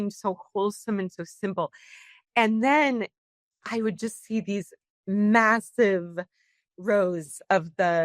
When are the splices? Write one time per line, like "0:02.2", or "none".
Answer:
0:04.9

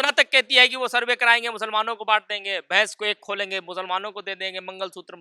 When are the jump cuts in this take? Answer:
none

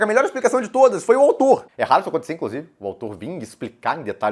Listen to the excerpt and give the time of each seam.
0:01.7

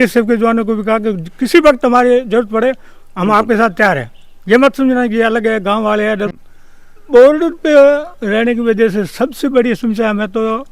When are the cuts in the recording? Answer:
0:06.3

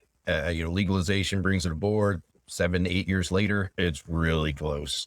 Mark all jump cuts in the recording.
0:02.3
0:03.7

